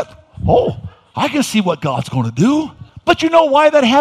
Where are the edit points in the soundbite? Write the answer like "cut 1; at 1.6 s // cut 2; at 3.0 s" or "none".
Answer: cut 1; at 2.8 s